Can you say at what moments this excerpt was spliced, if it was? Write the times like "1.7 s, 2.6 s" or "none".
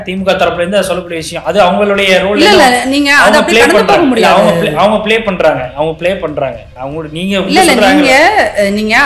6.7 s